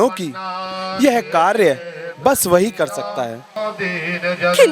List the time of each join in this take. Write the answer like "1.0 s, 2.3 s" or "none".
3.5 s